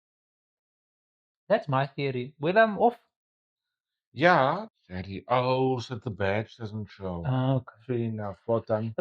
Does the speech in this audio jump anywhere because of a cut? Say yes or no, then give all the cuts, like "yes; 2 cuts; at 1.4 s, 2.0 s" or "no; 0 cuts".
yes; 1 cut; at 4.7 s